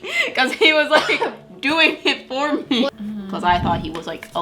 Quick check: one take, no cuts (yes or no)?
no